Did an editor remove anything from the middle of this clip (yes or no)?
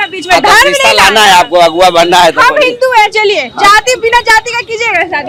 no